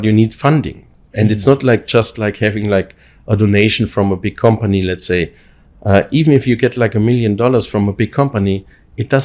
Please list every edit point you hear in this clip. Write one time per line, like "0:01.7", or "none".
none